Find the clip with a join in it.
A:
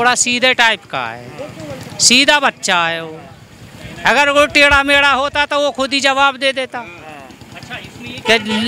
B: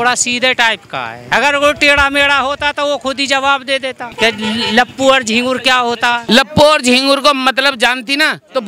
B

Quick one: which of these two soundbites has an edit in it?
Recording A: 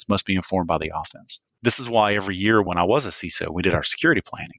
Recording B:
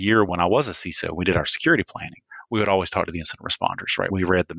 A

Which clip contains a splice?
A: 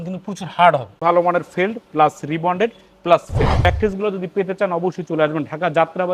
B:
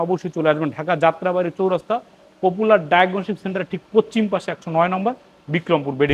A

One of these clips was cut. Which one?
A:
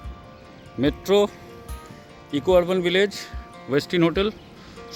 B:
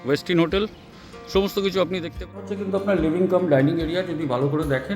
B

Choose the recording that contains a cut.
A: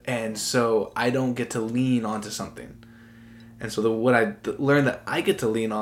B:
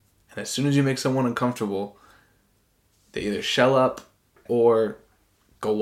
B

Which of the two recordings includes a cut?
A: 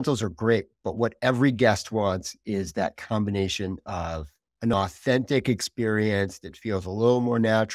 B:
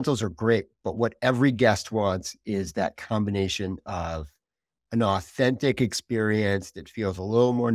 A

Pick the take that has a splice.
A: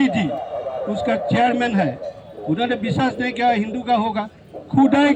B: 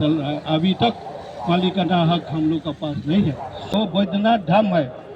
B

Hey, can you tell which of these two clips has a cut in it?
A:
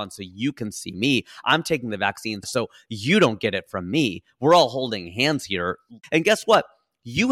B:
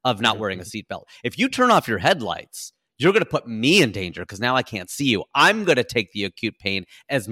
A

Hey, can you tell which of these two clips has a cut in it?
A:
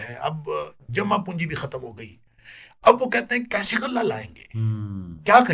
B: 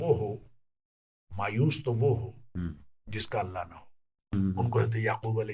B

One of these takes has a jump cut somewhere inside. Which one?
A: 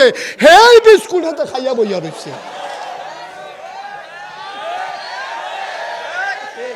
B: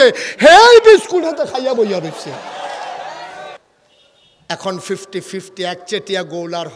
B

